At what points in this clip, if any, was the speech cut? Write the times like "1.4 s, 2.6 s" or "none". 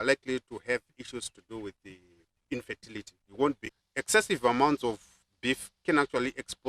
3.6 s